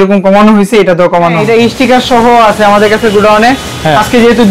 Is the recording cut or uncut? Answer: cut